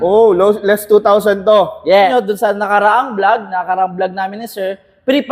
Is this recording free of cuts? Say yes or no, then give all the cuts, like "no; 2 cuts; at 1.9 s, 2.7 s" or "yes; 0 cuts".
no; 1 cut; at 2.1 s